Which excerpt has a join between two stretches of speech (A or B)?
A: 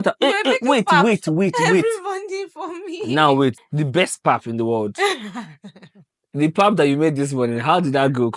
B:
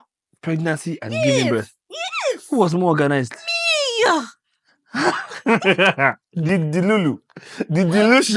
A